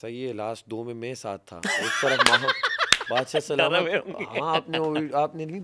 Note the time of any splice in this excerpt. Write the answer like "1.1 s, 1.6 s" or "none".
none